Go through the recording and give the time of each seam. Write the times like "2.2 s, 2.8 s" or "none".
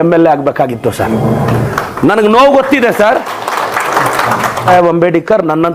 none